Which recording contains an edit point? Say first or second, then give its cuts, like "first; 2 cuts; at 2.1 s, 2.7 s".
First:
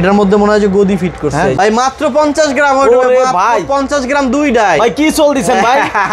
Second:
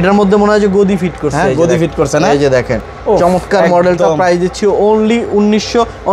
first; 1 cut; at 1.5 s